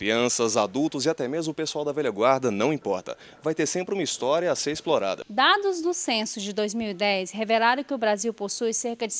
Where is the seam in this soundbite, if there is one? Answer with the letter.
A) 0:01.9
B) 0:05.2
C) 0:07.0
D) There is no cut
B